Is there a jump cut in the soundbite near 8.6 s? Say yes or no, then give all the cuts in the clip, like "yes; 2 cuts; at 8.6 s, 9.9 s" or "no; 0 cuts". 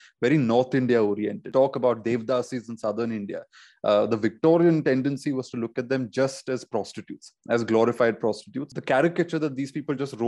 yes; 2 cuts; at 1.5 s, 8.6 s